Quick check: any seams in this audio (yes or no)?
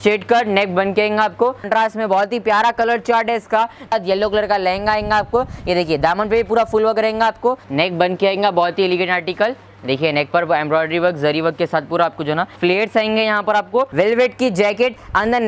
yes